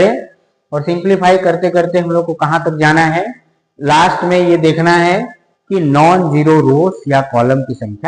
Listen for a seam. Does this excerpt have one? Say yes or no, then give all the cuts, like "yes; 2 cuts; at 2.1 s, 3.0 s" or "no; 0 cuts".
no; 0 cuts